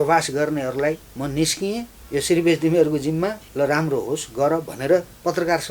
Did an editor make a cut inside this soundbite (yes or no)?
yes